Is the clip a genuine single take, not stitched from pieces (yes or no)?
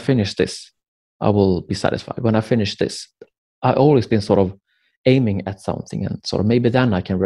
yes